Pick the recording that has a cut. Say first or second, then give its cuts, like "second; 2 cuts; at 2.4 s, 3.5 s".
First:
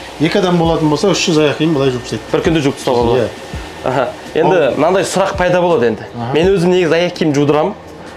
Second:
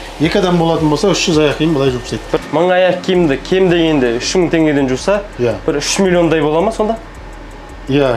second; 1 cut; at 2.4 s